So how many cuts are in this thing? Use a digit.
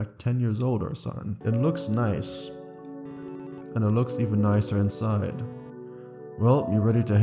0